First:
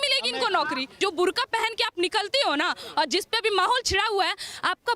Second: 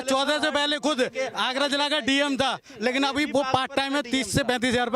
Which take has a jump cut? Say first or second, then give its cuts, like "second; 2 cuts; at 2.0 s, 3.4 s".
first; 1 cut; at 0.9 s